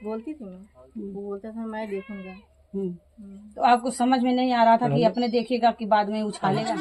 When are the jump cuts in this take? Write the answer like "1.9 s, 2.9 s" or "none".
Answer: none

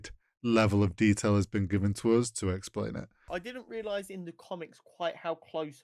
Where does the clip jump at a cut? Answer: 3.3 s

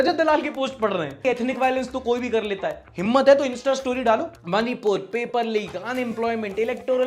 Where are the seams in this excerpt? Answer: 1.2 s, 4.3 s

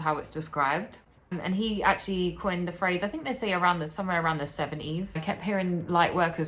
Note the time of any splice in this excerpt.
1.4 s, 5.2 s

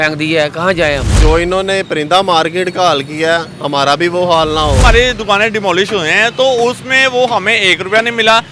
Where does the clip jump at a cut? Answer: 1.2 s, 4.8 s

